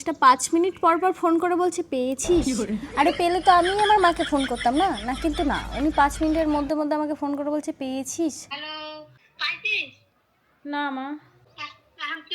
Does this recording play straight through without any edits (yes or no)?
no